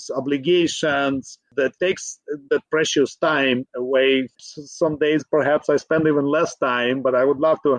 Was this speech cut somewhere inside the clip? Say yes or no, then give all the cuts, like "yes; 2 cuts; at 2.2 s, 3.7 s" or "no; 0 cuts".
yes; 2 cuts; at 1.5 s, 4.4 s